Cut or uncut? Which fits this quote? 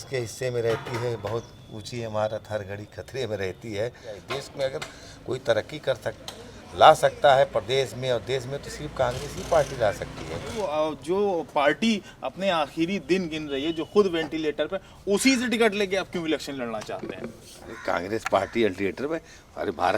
cut